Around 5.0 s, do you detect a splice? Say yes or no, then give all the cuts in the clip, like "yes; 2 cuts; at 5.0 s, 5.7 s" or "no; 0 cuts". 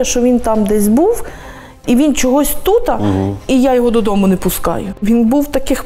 yes; 1 cut; at 5.0 s